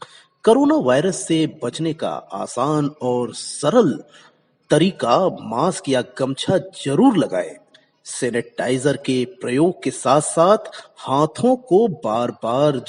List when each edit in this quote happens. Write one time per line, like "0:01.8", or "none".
none